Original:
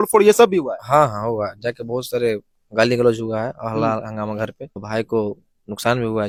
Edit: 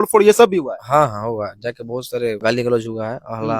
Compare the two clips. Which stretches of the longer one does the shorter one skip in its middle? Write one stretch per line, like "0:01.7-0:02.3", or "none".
0:02.4-0:02.7